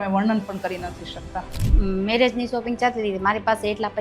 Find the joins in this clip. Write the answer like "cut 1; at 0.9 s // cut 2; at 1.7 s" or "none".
cut 1; at 1.7 s